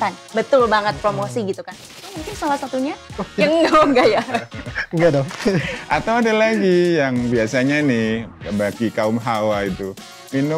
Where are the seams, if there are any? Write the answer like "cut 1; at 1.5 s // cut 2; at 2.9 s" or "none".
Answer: cut 1; at 2.3 s